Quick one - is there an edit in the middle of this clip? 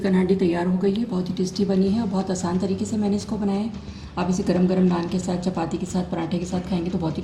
no; 0 cuts

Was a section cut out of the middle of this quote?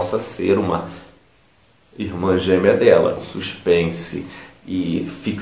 yes; 1 cut; at 3.3 s

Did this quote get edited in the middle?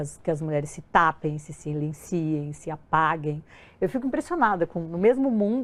no; 0 cuts

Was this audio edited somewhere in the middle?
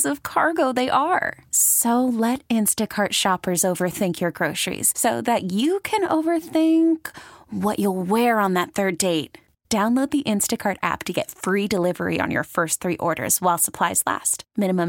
no; 0 cuts

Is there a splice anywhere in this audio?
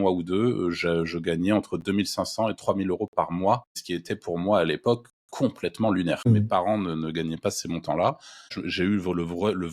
yes; 3 cuts; at 3.7 s, 6.4 s, 8.6 s

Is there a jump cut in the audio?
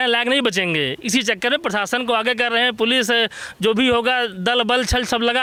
no; 0 cuts

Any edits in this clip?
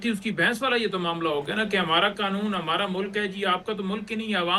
no; 0 cuts

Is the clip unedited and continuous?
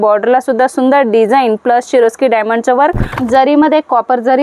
no; 1 cut; at 3.2 s

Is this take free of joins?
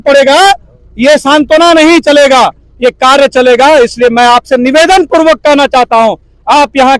yes; 0 cuts

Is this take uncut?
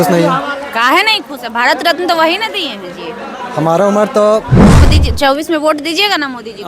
no; 1 cut; at 4.8 s

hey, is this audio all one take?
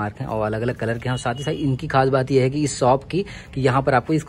yes; 0 cuts

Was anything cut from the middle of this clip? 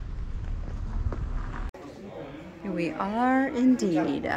yes; 1 cut; at 1.7 s

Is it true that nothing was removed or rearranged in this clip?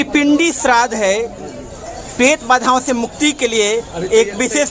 yes; 0 cuts

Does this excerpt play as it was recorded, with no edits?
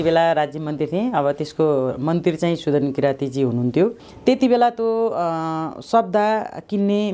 no; 1 cut; at 4.1 s

